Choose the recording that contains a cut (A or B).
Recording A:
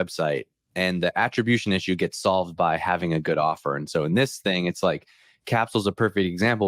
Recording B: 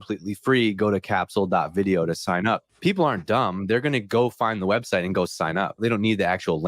B